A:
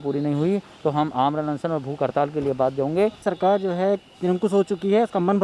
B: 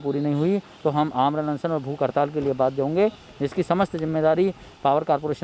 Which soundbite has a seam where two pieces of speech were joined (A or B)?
A